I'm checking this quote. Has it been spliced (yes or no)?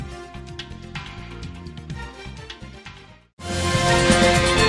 no